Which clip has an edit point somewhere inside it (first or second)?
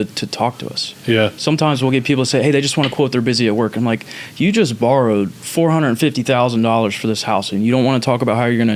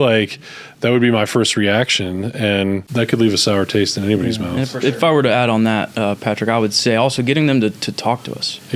second